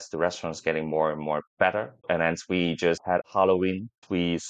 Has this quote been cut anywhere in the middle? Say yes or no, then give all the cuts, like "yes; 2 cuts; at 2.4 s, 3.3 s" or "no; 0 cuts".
yes; 2 cuts; at 2.0 s, 3.2 s